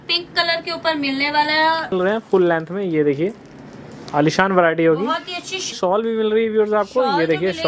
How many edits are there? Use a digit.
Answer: 2